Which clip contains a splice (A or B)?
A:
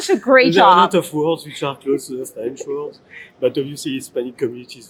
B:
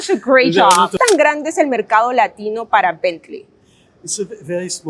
B